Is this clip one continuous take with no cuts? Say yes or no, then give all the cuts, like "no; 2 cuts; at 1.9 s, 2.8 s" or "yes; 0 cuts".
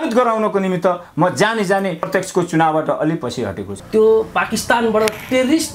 no; 2 cuts; at 2.1 s, 3.7 s